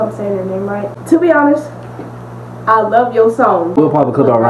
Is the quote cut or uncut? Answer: cut